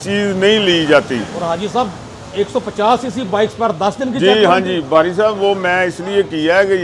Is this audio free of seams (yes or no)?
yes